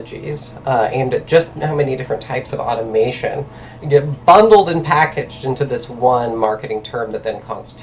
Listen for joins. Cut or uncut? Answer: uncut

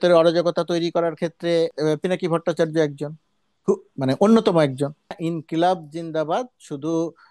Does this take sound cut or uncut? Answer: uncut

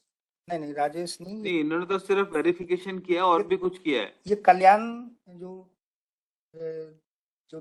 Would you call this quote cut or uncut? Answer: uncut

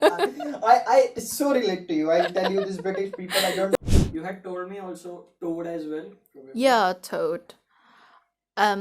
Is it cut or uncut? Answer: cut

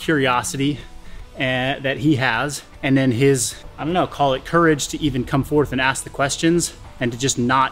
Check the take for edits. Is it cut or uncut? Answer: uncut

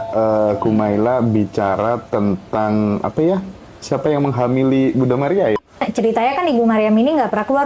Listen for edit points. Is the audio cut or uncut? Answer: cut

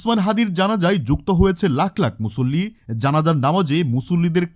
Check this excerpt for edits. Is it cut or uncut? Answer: uncut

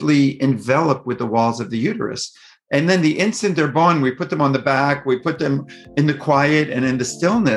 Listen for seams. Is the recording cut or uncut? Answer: uncut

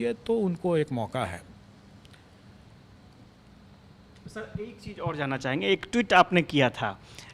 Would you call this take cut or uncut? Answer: uncut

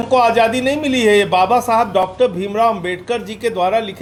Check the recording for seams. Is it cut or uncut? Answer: uncut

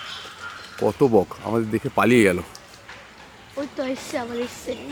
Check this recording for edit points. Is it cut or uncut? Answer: uncut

